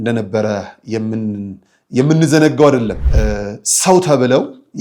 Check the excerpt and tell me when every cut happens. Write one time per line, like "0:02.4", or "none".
0:03.0